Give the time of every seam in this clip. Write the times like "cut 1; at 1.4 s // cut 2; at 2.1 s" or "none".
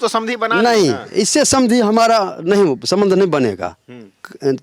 none